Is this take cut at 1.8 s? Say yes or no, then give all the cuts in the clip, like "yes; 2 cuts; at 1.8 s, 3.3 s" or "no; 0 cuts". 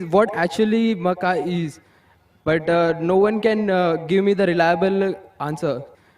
no; 1 cut; at 5.2 s